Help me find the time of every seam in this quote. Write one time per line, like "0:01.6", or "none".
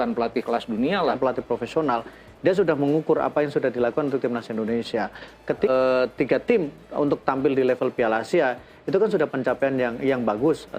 0:01.2
0:05.7